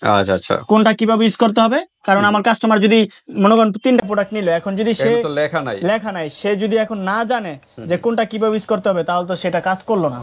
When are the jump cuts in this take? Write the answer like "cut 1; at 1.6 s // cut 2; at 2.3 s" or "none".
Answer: none